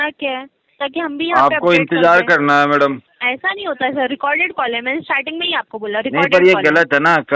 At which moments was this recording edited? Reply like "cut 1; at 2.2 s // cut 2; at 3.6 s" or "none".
cut 1; at 3.1 s